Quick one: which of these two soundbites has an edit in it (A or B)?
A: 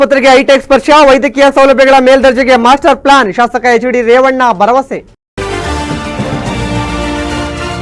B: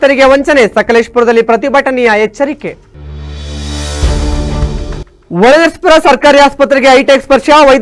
A